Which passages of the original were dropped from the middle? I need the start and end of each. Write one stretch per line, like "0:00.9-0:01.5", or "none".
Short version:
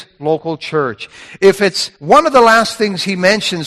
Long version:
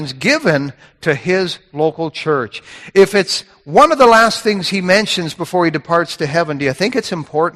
0:03.4-0:03.5